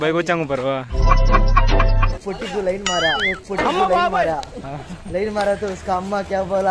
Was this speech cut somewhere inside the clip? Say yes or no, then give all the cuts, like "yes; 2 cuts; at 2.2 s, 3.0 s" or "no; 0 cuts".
yes; 1 cut; at 2.1 s